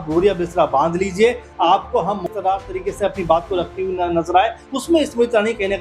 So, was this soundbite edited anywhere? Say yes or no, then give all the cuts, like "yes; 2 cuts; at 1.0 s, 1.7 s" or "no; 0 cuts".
yes; 1 cut; at 2.3 s